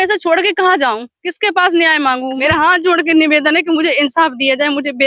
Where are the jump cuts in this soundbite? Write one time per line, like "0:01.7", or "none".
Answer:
0:02.3